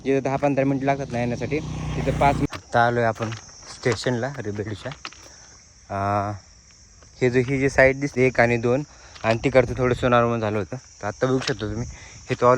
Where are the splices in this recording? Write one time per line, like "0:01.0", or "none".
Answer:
0:02.5
0:08.1